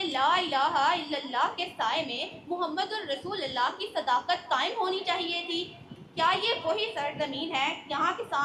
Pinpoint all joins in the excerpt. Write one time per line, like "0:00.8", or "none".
none

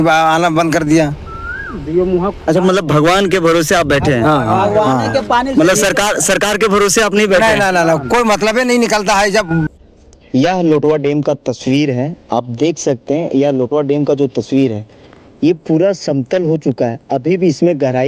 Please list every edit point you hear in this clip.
none

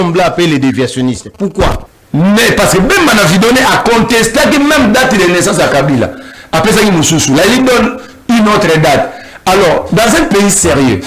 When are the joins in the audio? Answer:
0:01.9

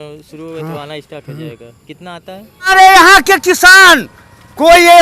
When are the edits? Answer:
0:02.7

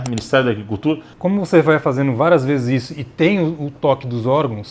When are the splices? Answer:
0:01.1

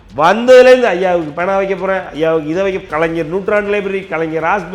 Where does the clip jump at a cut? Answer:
0:02.9

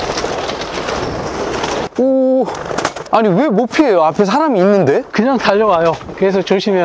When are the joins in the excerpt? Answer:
0:01.9
0:03.0
0:06.0

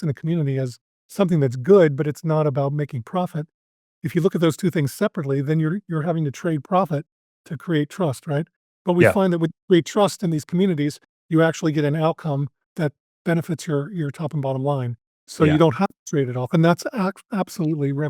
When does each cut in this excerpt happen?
0:12.6

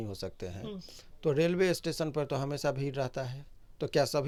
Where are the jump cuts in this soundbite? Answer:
none

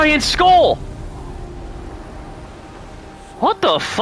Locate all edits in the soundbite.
none

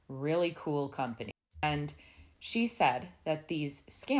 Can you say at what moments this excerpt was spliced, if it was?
0:01.3

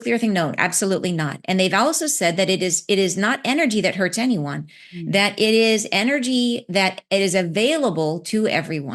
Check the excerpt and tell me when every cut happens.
none

